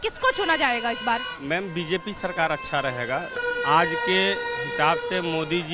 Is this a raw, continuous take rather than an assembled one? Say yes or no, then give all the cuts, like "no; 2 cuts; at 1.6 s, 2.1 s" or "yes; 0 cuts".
no; 1 cut; at 3.4 s